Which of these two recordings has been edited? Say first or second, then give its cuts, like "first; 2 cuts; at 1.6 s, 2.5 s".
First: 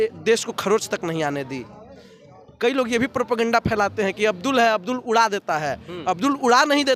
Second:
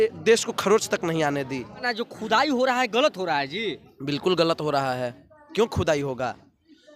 second; 1 cut; at 1.8 s